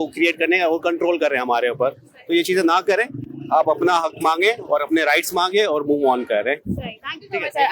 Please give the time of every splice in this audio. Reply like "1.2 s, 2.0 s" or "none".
none